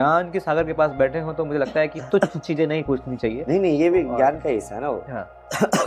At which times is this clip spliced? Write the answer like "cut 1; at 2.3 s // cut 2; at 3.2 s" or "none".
none